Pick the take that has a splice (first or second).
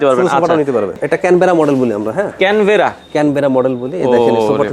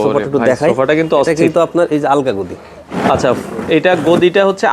first